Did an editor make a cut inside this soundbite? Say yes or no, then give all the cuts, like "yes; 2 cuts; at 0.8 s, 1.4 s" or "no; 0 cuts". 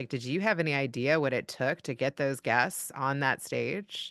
no; 0 cuts